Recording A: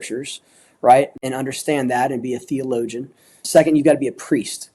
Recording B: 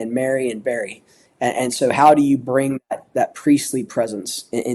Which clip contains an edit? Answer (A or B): A